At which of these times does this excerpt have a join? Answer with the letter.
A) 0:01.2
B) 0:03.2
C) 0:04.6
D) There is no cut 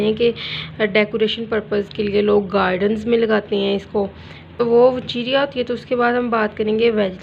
C